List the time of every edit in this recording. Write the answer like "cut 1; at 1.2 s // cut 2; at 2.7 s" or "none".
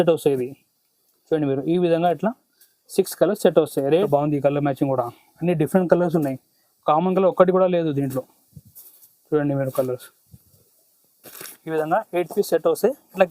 cut 1; at 3.9 s